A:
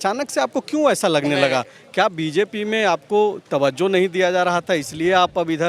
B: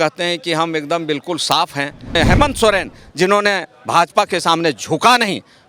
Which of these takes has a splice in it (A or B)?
B